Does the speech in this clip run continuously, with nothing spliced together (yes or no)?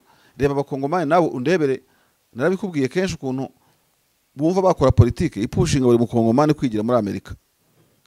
yes